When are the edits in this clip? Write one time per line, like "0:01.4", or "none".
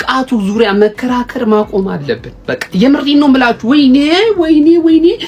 none